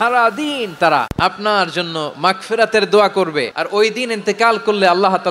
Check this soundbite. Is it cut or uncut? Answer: cut